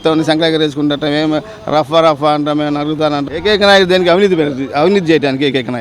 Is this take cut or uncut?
cut